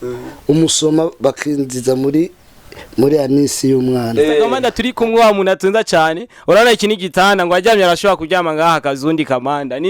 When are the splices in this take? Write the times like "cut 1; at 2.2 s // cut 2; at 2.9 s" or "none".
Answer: cut 1; at 4.6 s